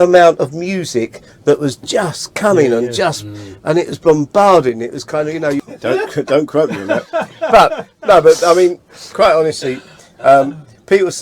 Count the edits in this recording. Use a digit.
1